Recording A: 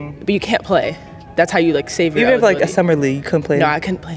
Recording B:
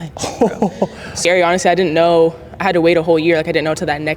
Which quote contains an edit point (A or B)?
B